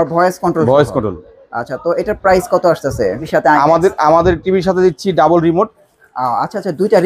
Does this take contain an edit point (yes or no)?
yes